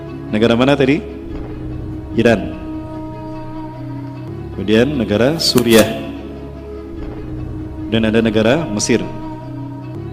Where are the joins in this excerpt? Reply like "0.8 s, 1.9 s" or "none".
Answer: 3.0 s, 4.5 s